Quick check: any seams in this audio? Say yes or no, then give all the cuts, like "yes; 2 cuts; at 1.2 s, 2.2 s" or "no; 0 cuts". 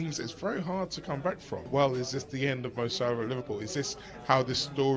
yes; 1 cut; at 1.7 s